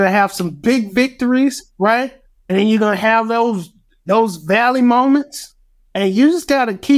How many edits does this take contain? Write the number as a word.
one